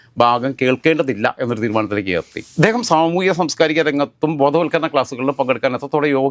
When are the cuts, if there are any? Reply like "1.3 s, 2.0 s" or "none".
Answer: 2.4 s

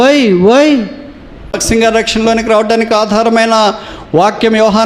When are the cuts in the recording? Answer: 1.6 s

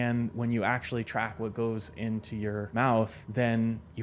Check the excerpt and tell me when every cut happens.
3.0 s

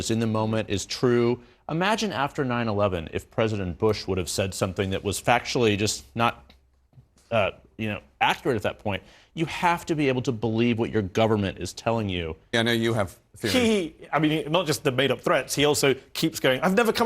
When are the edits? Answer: 12.5 s

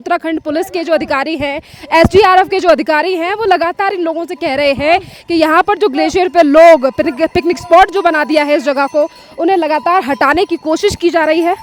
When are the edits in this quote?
none

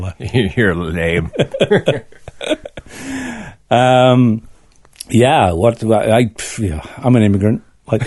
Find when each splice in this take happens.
none

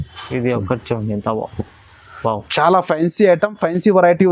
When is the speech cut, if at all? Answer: none

